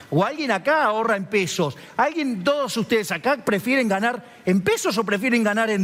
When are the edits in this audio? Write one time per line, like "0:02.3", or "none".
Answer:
none